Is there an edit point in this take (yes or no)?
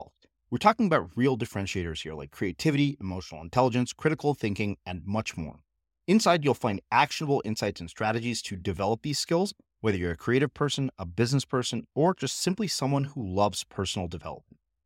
no